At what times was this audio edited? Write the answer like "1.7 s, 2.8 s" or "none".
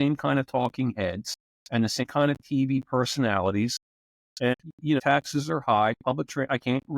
2.0 s, 5.0 s